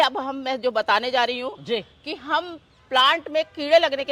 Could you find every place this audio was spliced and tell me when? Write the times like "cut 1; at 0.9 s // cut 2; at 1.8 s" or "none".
none